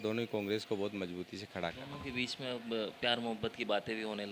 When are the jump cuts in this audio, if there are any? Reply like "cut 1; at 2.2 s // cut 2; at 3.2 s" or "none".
none